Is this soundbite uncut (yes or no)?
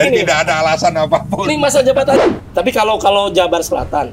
no